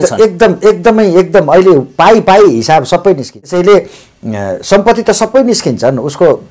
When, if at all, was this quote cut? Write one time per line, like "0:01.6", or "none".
0:03.4